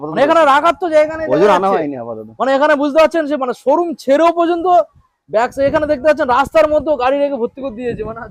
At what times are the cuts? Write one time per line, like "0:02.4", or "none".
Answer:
none